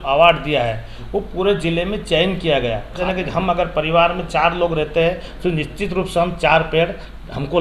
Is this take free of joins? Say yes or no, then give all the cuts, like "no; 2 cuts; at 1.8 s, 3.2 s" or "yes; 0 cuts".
no; 1 cut; at 3.0 s